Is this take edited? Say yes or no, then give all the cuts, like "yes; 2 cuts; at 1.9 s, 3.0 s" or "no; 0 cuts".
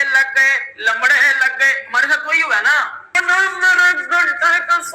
yes; 1 cut; at 3.2 s